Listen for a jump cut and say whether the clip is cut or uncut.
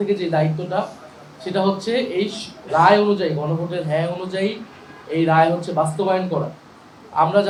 uncut